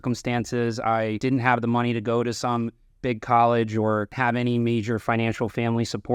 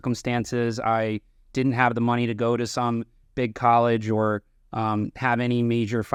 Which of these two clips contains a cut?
first; 2 cuts; at 1.2 s, 4.1 s

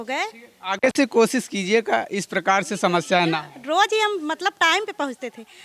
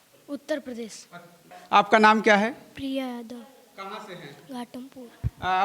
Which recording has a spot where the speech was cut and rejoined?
second; 1 cut; at 1.4 s

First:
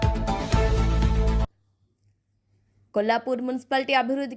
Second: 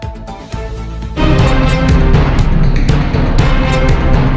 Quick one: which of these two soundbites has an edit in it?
first; 1 cut; at 1.1 s

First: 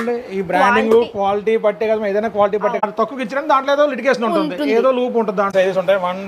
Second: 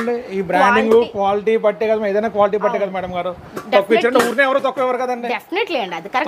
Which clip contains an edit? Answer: first; 2 cuts; at 2.8 s, 5.5 s

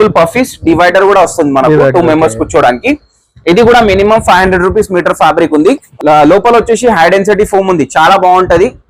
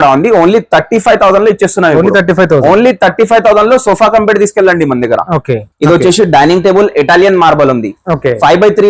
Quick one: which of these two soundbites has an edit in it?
second; 1 cut; at 5.6 s

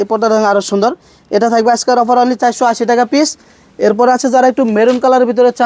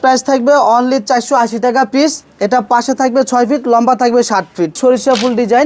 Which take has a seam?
second; 1 cut; at 4.8 s

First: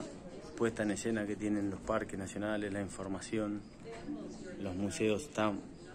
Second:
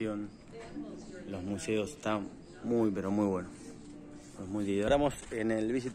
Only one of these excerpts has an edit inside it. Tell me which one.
second; 1 cut; at 4.9 s

